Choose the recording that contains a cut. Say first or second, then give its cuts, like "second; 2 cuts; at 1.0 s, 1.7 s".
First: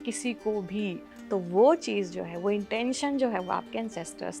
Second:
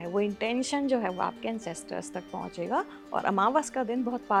first; 1 cut; at 1.1 s